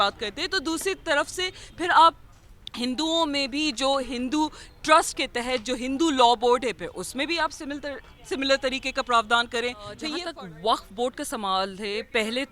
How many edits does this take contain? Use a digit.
1